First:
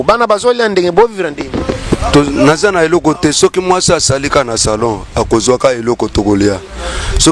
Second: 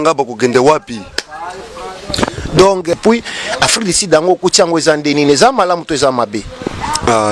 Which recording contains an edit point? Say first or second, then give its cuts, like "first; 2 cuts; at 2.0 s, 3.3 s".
second; 1 cut; at 2.9 s